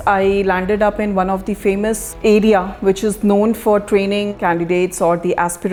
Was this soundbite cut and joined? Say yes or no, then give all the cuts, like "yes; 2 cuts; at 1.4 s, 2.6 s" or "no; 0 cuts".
no; 0 cuts